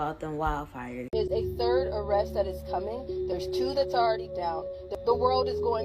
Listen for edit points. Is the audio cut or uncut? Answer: cut